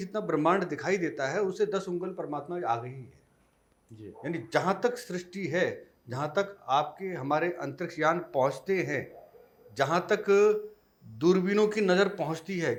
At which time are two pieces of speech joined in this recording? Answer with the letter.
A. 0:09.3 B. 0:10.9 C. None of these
C